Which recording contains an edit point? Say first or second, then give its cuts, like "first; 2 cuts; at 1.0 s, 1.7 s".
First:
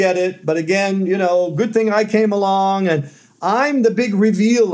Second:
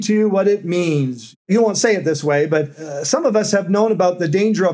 second; 2 cuts; at 1.4 s, 2.8 s